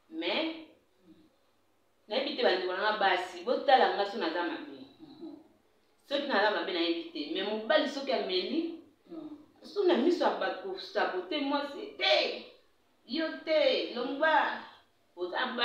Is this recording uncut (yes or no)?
yes